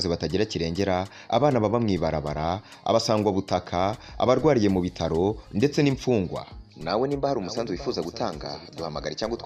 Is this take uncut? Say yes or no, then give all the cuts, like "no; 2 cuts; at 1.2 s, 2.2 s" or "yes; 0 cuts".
yes; 0 cuts